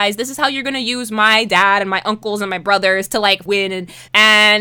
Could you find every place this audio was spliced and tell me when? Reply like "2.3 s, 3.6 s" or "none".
3.7 s